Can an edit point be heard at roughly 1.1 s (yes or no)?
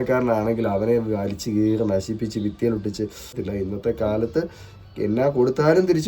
no